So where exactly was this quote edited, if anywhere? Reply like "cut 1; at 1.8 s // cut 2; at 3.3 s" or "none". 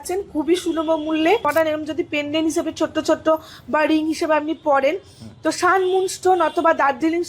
cut 1; at 1.4 s